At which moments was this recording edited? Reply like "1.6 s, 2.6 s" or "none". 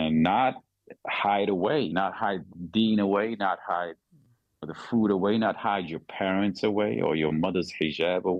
1.9 s, 4.7 s